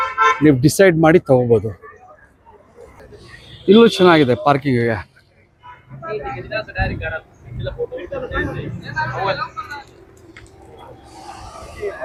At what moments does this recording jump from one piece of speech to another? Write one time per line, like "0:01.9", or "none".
none